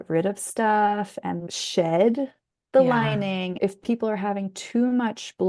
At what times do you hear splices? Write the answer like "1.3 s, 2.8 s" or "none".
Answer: 3.6 s

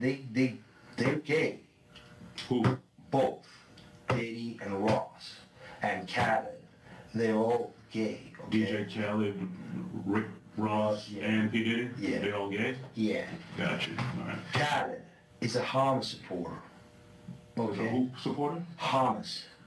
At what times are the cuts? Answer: none

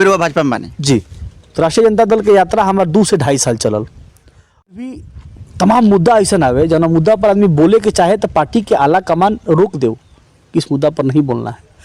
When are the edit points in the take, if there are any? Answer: 4.7 s

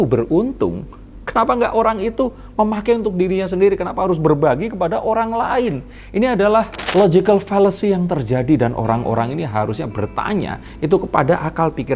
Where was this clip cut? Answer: none

